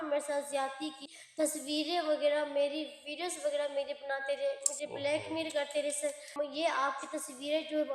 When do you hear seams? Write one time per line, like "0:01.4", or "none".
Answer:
0:01.0
0:06.3